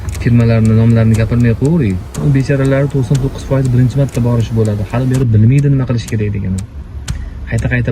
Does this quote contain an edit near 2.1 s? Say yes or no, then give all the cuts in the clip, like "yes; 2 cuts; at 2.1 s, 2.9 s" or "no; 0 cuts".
yes; 1 cut; at 2.1 s